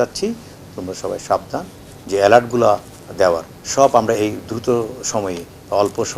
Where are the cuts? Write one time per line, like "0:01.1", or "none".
0:01.9